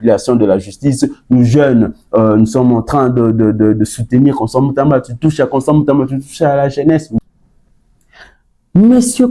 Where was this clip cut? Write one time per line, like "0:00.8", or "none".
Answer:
0:07.2